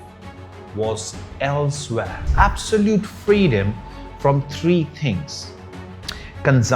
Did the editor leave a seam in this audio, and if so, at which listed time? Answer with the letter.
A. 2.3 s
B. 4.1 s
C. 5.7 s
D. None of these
A